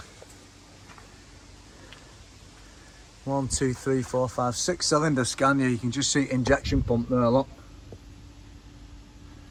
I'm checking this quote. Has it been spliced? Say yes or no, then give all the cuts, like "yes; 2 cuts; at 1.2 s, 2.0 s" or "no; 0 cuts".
no; 0 cuts